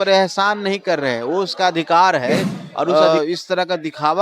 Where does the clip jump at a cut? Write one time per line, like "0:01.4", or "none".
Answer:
0:02.9